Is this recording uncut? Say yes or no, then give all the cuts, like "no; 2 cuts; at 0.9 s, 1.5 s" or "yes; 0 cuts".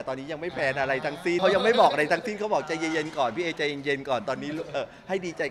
no; 1 cut; at 1.4 s